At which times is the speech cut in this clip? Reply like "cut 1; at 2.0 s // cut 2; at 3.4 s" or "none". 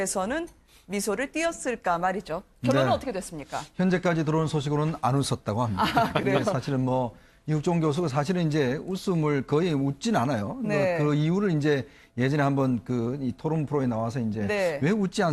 cut 1; at 13.0 s